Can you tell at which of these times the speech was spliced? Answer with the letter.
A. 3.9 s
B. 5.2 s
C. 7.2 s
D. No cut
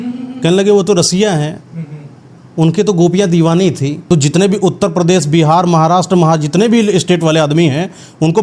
A